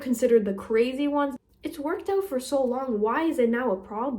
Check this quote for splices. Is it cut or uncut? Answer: cut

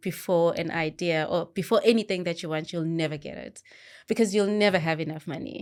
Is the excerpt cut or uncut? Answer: uncut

